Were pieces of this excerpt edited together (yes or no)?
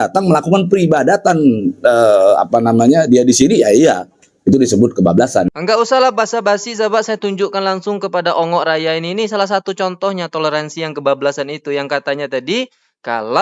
yes